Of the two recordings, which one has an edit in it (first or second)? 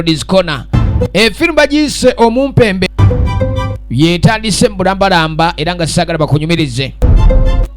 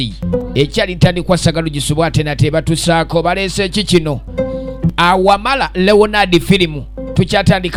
first